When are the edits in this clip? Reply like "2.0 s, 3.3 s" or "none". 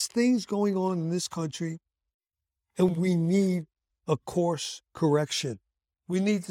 none